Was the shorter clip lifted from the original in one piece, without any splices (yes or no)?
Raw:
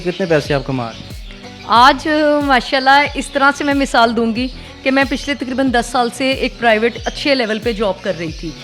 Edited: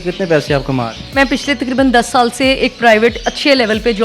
no